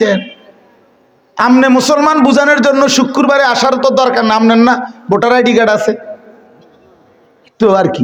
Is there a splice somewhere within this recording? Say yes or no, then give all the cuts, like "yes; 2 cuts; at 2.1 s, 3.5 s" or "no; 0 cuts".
no; 0 cuts